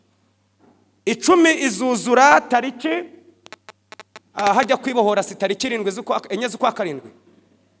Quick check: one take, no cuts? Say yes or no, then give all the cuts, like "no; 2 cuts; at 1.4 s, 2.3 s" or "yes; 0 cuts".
yes; 0 cuts